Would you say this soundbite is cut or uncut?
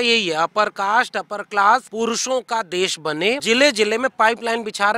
cut